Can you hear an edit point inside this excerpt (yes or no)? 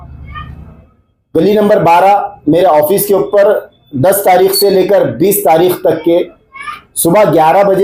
no